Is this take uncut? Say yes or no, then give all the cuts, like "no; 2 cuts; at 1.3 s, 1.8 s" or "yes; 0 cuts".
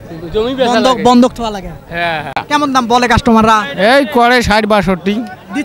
no; 1 cut; at 2.4 s